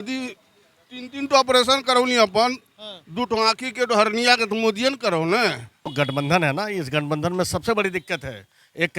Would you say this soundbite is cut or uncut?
cut